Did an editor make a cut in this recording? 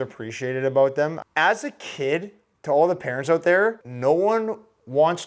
yes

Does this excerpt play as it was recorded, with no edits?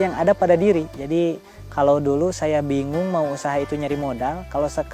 no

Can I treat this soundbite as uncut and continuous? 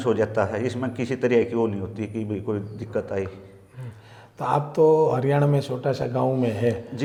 yes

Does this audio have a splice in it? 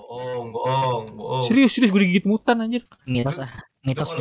no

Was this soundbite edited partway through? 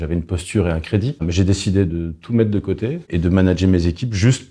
yes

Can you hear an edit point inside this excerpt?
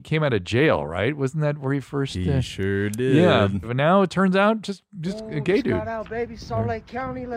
yes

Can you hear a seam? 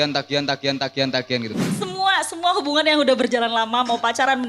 yes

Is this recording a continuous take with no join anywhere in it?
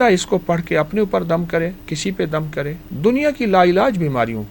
no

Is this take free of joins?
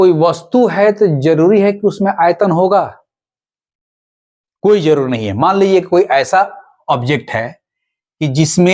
yes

